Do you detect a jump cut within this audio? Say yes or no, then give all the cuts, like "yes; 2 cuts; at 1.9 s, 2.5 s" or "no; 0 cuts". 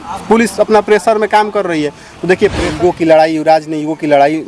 yes; 1 cut; at 2.6 s